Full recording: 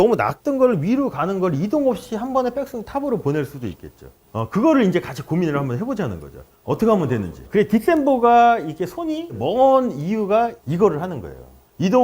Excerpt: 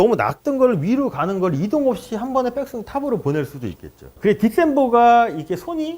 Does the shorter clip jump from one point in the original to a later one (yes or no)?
yes